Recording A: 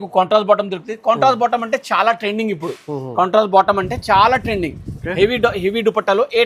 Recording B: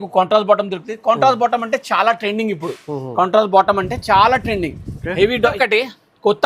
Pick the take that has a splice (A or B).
B